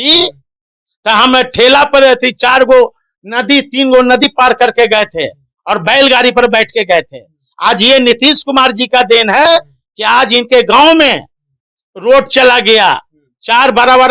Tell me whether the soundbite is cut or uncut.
uncut